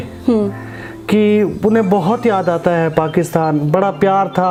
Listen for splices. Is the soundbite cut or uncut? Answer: uncut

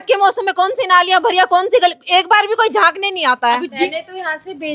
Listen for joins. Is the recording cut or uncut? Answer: cut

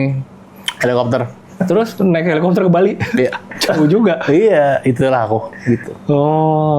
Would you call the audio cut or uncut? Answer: uncut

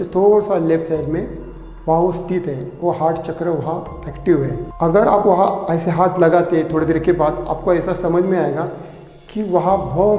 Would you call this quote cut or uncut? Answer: uncut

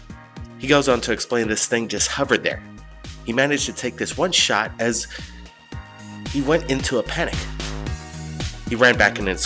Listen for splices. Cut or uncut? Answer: uncut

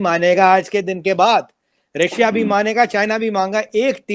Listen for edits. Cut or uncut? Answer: uncut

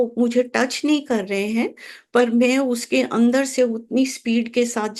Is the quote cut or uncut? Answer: uncut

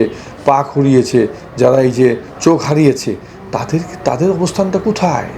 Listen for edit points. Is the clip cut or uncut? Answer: uncut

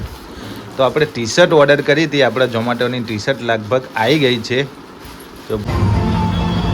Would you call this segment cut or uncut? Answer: cut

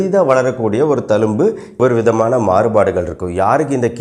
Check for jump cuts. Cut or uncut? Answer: cut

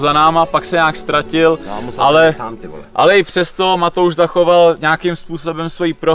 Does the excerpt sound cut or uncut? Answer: uncut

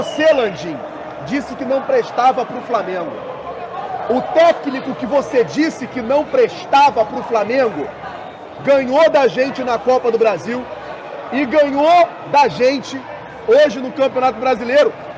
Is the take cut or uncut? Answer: uncut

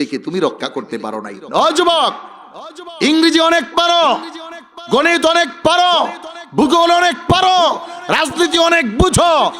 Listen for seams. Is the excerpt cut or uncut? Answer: cut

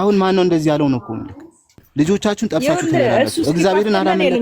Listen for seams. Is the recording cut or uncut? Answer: cut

